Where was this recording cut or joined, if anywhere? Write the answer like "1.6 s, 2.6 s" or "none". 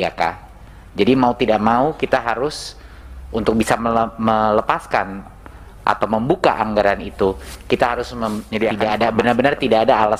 8.8 s